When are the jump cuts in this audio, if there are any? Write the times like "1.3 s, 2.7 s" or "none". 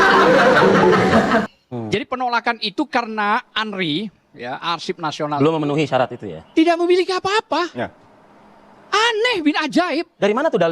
none